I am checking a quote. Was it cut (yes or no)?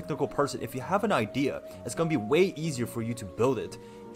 no